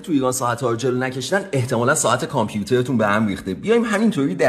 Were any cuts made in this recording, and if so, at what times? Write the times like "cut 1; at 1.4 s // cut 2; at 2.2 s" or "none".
none